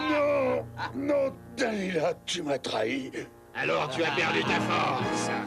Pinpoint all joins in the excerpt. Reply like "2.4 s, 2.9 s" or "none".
1.6 s